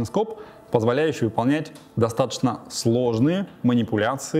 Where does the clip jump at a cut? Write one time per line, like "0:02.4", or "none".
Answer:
none